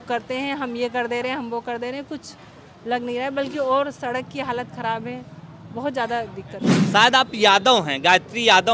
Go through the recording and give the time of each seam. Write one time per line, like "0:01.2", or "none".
0:06.7